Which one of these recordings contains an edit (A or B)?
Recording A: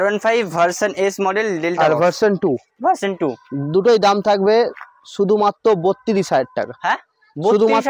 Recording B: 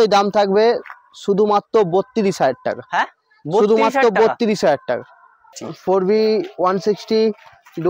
B